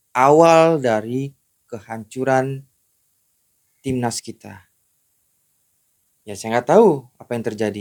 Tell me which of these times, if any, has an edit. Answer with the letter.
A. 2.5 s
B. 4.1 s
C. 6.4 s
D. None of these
D